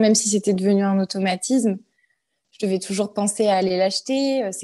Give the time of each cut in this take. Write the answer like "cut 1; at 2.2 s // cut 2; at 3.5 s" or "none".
none